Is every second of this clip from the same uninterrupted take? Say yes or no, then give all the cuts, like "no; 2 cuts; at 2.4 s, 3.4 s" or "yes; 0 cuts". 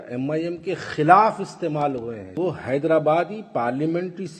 no; 1 cut; at 2.3 s